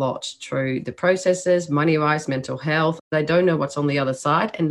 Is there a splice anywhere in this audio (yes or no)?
yes